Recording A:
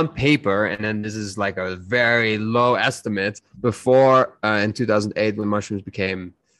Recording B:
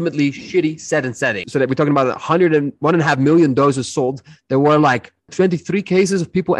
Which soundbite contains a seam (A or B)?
B